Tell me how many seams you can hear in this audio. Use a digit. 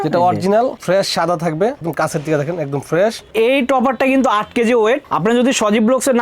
3